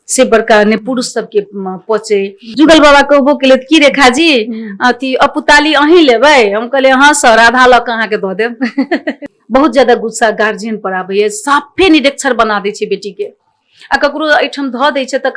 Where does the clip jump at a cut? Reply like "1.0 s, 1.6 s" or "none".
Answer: 2.5 s, 9.3 s